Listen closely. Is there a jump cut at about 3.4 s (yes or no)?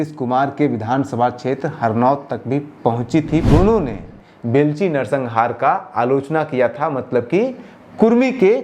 yes